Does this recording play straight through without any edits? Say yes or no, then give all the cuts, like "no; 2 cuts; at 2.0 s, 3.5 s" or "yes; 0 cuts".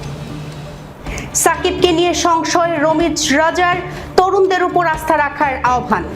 no; 1 cut; at 1.4 s